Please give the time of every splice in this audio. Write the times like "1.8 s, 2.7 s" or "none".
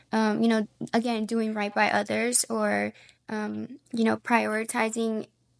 none